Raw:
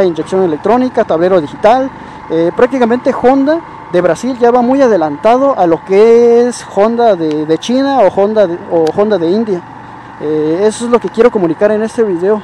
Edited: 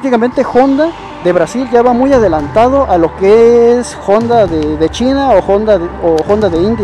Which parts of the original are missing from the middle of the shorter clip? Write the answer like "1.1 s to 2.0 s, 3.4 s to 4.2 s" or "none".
none

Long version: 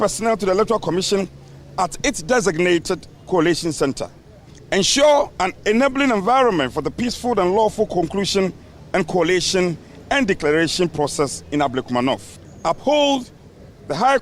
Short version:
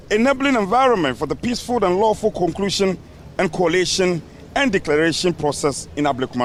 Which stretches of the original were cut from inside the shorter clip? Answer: none

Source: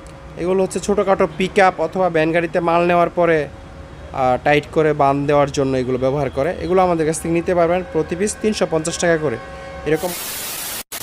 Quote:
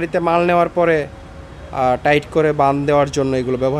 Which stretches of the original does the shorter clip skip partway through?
none

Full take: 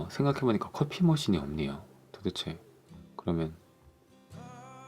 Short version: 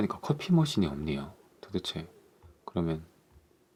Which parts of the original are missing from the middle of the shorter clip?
none

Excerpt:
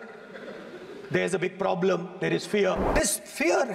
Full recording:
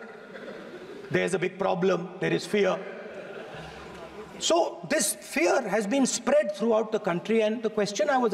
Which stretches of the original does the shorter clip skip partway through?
2.9 s to 4.8 s

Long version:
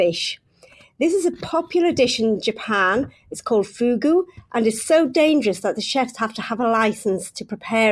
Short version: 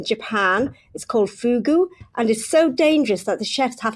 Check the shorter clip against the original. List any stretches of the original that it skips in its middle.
none

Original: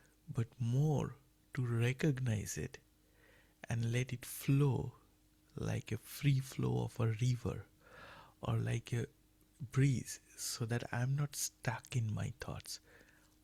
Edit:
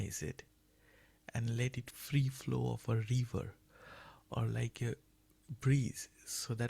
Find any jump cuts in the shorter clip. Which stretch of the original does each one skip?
4.3 s to 6.1 s

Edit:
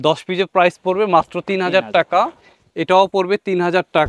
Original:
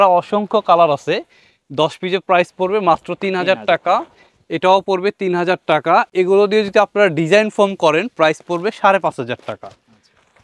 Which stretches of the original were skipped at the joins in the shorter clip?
none

